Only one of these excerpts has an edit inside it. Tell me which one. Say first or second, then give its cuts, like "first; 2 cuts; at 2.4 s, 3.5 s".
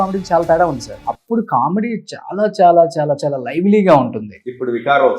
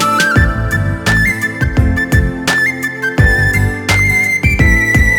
first; 1 cut; at 0.9 s